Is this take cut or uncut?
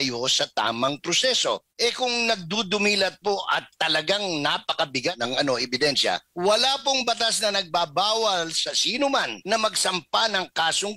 cut